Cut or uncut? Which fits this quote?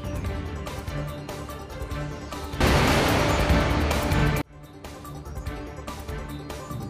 uncut